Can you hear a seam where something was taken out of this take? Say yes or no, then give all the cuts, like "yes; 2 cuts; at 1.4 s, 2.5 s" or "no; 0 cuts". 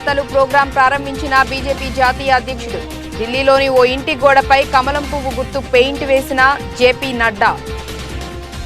yes; 1 cut; at 7.6 s